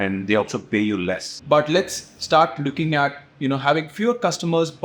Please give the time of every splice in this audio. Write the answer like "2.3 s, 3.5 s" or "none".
1.3 s